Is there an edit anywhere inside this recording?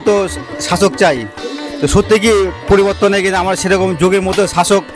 no; 0 cuts

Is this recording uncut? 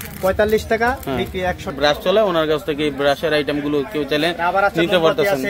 no; 1 cut; at 1.8 s

